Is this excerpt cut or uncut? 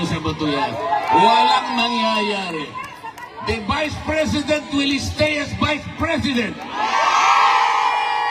uncut